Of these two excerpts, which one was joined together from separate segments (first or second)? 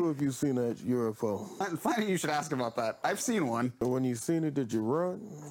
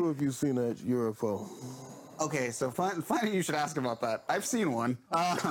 first